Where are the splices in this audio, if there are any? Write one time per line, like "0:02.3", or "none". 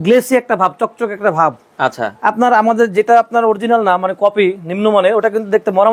none